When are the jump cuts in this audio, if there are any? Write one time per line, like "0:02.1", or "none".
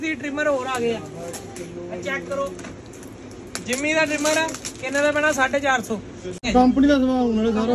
0:06.4